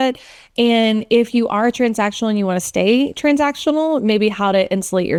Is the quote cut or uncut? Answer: uncut